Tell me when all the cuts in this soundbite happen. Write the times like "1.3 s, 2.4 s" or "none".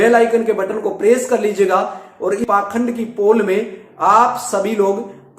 2.4 s